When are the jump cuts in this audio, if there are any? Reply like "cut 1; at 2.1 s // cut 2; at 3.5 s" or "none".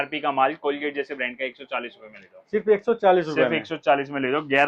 none